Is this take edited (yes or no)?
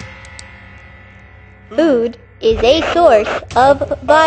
yes